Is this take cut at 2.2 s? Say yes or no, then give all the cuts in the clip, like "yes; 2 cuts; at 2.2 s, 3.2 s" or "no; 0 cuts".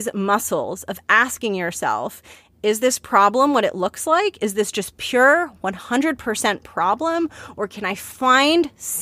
no; 0 cuts